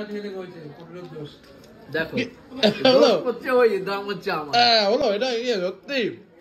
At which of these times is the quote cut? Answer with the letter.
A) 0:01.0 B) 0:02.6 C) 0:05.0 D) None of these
D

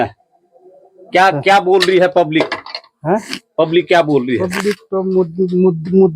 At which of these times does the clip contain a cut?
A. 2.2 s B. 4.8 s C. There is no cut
C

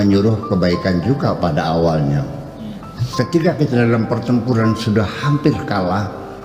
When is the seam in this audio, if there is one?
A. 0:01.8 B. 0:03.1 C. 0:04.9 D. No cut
B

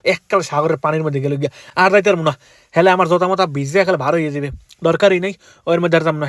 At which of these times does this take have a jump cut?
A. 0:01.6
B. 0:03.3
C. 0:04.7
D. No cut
D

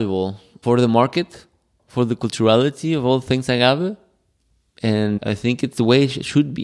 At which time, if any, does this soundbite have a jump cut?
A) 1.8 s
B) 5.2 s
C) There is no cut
B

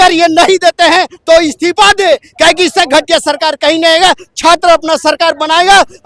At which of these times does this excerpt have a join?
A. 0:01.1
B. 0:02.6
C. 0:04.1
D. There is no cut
D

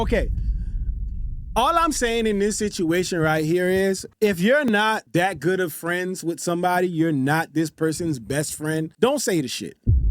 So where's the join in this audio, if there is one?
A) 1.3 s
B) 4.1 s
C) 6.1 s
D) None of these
B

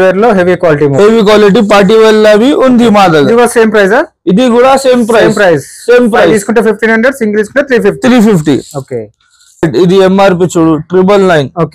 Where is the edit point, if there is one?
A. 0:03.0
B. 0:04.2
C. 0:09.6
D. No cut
C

